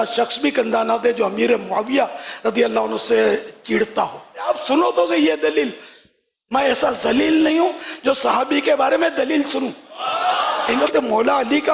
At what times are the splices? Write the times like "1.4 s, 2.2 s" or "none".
4.5 s, 10.7 s